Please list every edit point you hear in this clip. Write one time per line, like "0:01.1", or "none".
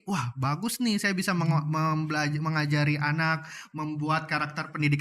none